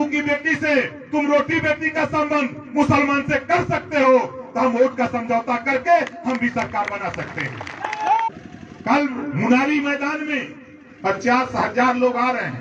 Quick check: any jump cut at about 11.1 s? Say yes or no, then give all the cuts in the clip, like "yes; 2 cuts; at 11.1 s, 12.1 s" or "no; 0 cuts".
no; 1 cut; at 8.3 s